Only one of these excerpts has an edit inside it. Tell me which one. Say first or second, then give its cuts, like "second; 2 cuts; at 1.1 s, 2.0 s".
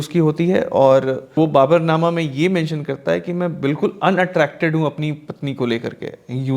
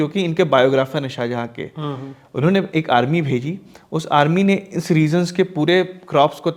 first; 1 cut; at 1.4 s